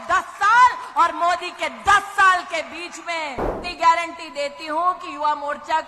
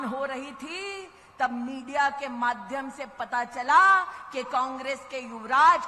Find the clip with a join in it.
first; 1 cut; at 3.6 s

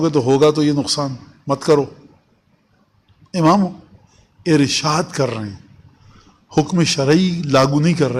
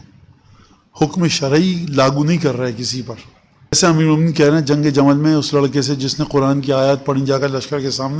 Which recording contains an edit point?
second; 1 cut; at 3.8 s

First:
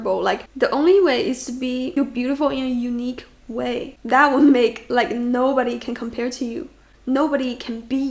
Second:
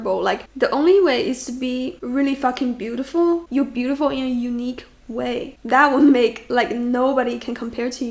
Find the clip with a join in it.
first; 2 cuts; at 1.9 s, 6.8 s

